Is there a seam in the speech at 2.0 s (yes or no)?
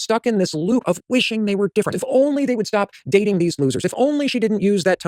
yes